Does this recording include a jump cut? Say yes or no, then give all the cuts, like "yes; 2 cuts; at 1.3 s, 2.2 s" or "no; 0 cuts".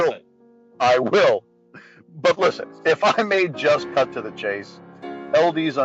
yes; 1 cut; at 4.1 s